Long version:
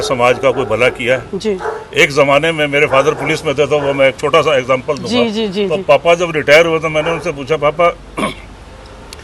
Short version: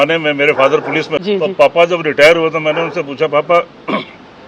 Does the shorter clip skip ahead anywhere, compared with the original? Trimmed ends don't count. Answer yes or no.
yes